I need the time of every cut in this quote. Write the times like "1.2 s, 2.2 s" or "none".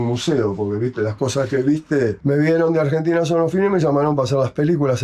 2.2 s